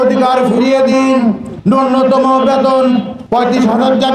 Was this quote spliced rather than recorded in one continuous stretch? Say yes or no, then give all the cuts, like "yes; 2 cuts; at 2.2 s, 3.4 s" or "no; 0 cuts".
yes; 2 cuts; at 1.5 s, 3.2 s